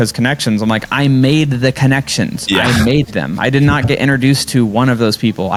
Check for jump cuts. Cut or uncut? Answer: uncut